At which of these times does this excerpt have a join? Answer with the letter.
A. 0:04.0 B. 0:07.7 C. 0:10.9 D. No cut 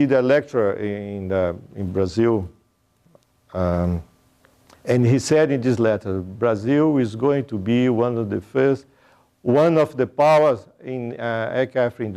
B